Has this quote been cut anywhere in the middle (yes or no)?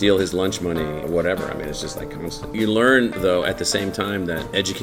yes